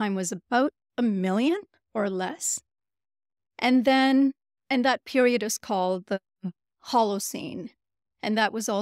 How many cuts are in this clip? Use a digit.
0